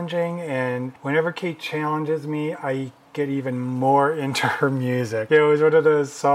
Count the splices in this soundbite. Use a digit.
1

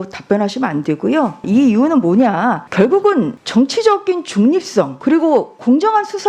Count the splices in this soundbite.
4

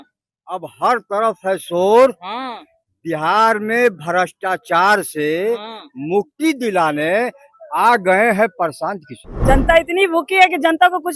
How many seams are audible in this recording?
1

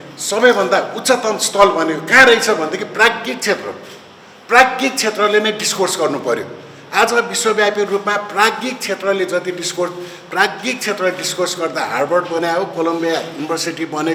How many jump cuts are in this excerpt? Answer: 0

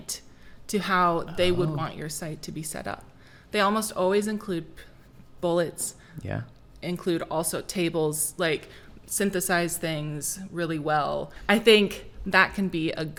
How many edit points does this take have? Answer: 0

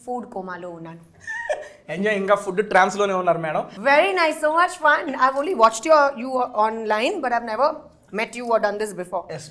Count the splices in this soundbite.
1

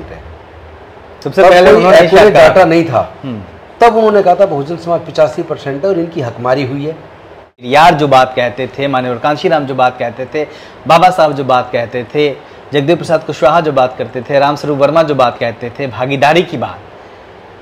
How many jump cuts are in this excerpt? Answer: 1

